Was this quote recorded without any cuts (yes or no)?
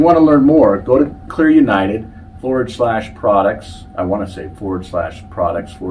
no